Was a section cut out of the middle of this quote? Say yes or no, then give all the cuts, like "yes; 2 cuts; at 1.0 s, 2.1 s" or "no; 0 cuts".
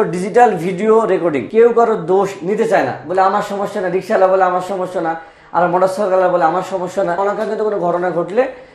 yes; 2 cuts; at 1.5 s, 7.2 s